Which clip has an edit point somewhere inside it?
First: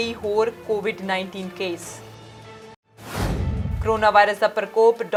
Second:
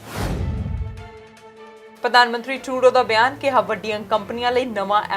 second; 1 cut; at 2.0 s

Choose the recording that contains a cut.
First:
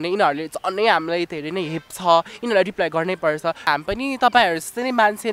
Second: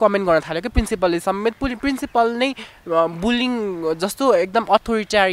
first; 1 cut; at 3.7 s

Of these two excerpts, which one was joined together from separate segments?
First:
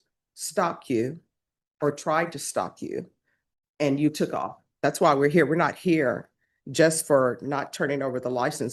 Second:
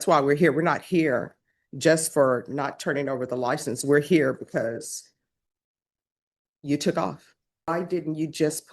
second; 1 cut; at 7.7 s

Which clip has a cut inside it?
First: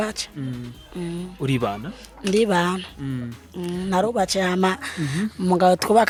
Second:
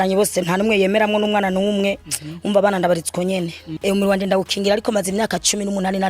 second; 1 cut; at 3.6 s

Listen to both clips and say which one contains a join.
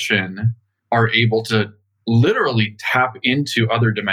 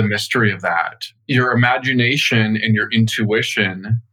second; 1 cut; at 1.0 s

